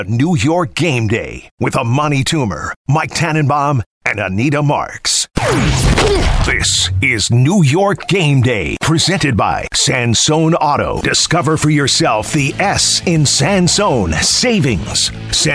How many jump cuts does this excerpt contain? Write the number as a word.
one